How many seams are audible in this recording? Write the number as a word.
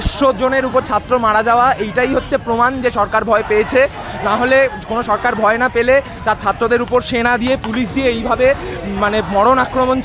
zero